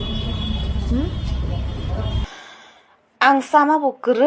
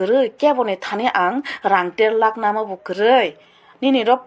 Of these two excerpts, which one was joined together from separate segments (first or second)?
first